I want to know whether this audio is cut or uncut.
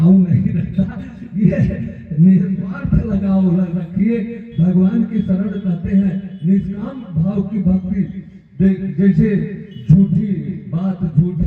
uncut